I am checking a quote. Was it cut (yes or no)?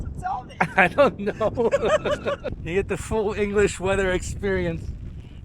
yes